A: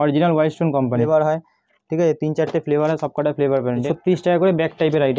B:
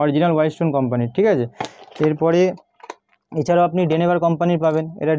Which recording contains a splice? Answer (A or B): A